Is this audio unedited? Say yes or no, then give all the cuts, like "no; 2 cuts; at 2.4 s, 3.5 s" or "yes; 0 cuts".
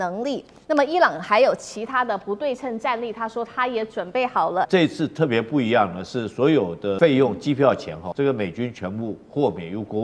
no; 3 cuts; at 4.7 s, 7.0 s, 8.0 s